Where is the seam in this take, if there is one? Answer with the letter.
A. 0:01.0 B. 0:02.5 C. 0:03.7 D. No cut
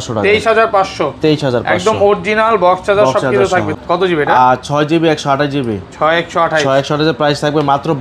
C